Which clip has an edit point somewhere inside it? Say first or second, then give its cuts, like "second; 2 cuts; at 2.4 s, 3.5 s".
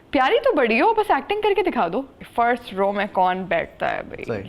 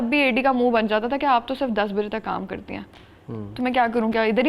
first; 1 cut; at 2.2 s